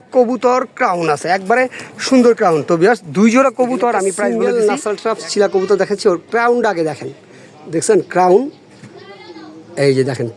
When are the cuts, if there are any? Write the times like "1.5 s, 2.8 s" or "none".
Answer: 4.2 s